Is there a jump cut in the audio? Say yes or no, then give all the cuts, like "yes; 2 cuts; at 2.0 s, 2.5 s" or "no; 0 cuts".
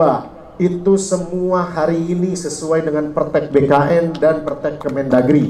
no; 0 cuts